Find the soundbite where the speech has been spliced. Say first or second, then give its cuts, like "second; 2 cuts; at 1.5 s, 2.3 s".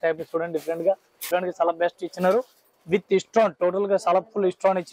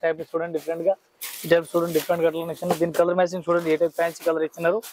first; 1 cut; at 1.2 s